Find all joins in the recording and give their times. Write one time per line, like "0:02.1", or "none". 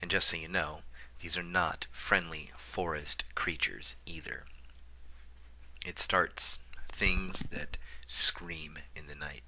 0:01.5

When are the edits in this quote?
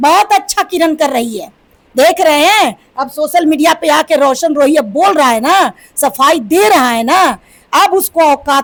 none

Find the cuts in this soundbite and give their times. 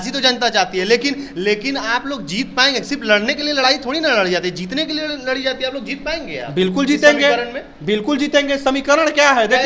none

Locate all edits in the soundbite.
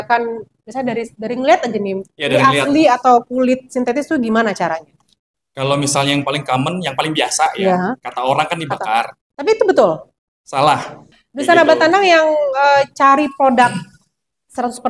0:11.0

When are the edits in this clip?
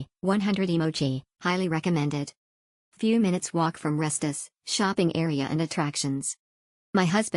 none

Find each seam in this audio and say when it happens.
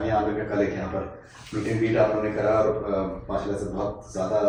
none

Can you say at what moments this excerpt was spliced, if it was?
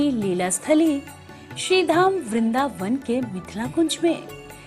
none

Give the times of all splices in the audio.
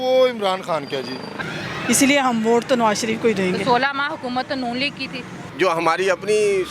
0:01.3
0:05.4

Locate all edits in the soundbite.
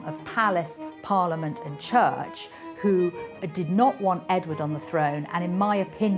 none

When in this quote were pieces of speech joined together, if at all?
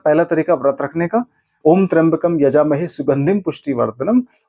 0:01.4

